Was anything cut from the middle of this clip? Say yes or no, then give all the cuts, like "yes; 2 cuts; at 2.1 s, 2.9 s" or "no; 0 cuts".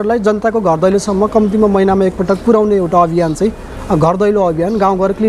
no; 0 cuts